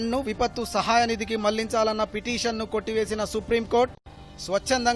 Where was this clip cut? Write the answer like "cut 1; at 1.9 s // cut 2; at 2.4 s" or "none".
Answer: none